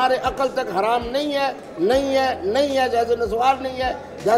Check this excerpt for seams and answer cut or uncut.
uncut